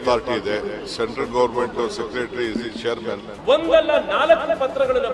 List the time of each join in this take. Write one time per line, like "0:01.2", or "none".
0:03.3